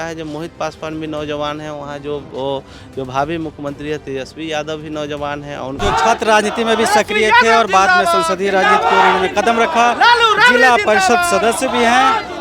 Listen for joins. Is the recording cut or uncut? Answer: cut